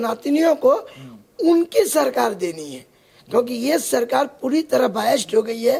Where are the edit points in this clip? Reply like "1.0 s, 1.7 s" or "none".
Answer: none